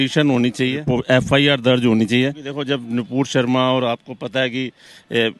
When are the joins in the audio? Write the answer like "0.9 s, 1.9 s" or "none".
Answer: 0.9 s, 2.5 s